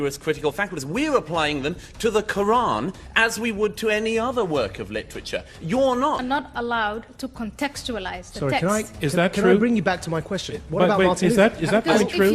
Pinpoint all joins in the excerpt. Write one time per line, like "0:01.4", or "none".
0:06.2